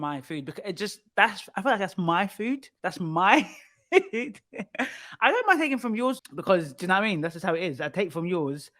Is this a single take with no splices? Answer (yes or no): no